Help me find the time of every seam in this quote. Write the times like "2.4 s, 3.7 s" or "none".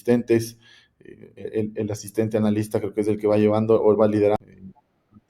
4.4 s